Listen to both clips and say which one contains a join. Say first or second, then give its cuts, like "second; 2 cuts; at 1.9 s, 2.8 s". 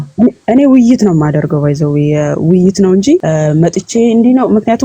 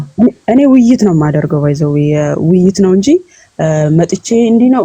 first; 1 cut; at 3.2 s